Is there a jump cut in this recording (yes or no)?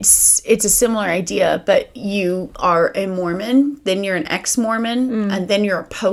no